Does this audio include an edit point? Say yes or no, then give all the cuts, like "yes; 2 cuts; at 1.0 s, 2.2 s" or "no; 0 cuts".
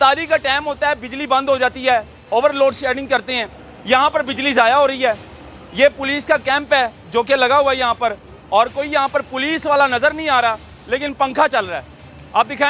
no; 0 cuts